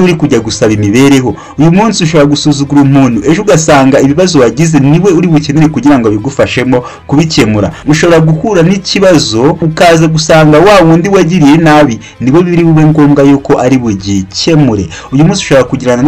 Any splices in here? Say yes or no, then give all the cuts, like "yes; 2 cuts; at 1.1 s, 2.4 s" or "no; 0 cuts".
no; 0 cuts